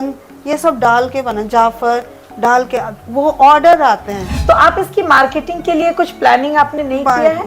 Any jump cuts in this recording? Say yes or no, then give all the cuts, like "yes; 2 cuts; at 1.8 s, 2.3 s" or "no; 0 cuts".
yes; 1 cut; at 4.2 s